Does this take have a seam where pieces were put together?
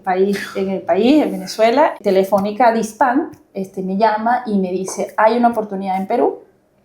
yes; 1 cut; at 2.0 s

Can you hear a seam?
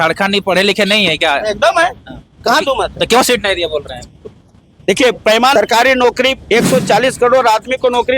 yes; 1 cut; at 5.5 s

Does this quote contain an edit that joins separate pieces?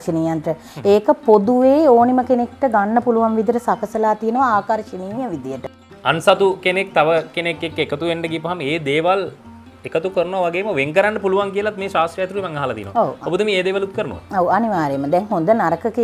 yes; 1 cut; at 5.6 s

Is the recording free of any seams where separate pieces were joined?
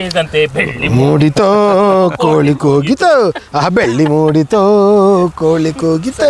yes; 0 cuts

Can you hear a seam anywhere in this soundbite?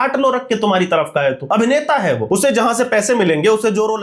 yes; 2 cuts; at 1.4 s, 2.2 s

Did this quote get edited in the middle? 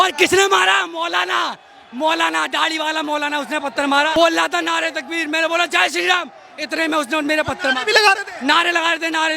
yes; 1 cut; at 4.1 s

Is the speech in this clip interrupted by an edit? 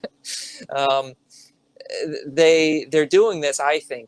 no; 0 cuts

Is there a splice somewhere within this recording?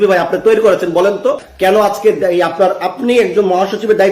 yes; 1 cut; at 1.5 s

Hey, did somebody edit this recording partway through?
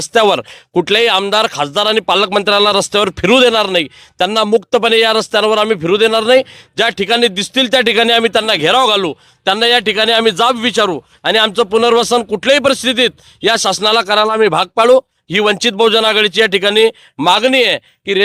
no; 0 cuts

